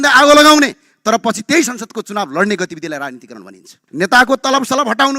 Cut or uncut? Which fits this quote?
cut